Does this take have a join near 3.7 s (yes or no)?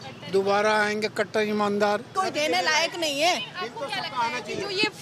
no